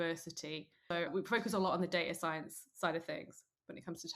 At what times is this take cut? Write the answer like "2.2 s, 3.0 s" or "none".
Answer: 1.1 s